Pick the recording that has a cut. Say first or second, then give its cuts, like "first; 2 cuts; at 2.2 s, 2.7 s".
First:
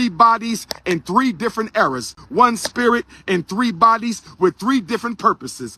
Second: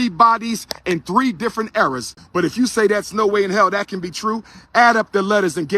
second; 1 cut; at 2.2 s